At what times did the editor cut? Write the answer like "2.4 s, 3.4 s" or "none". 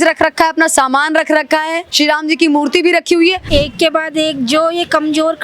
1.9 s, 3.4 s